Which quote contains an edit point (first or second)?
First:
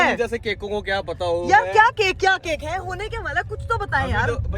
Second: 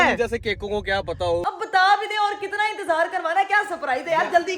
second